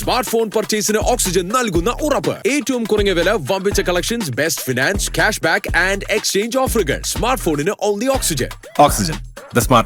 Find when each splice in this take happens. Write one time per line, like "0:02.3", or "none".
none